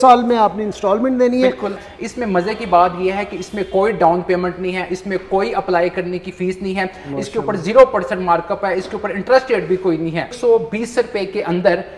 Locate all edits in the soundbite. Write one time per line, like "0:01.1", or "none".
0:01.8
0:10.3